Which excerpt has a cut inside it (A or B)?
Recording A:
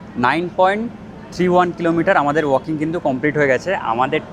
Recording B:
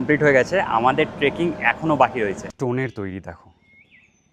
B